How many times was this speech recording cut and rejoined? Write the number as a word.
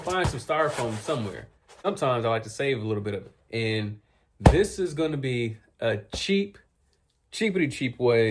one